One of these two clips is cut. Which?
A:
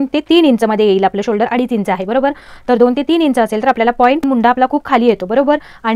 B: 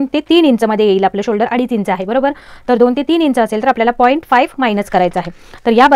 A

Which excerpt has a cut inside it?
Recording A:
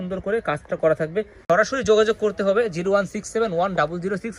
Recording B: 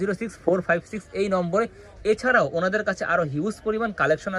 A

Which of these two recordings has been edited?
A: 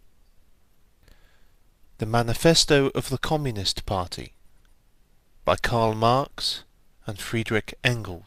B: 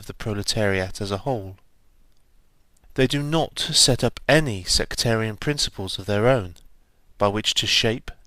B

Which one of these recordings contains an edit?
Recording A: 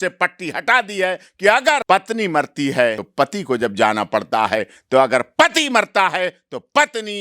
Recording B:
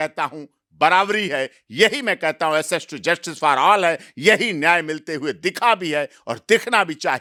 A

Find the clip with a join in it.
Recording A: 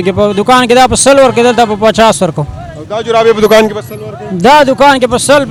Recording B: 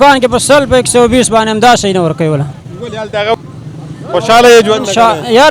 B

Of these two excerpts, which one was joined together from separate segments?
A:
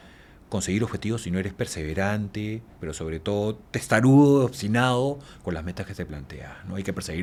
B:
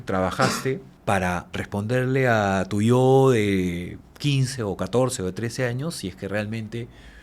B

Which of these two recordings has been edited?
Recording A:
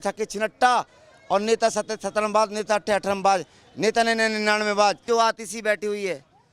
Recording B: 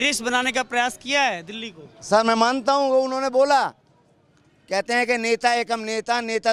A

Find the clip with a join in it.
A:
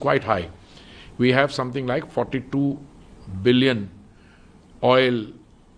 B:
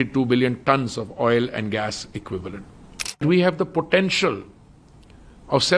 B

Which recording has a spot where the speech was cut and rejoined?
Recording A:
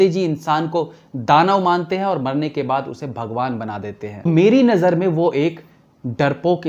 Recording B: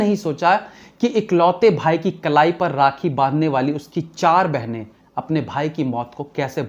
A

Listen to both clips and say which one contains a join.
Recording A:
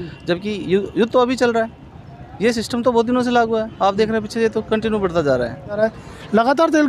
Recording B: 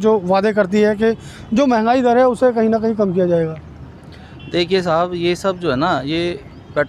A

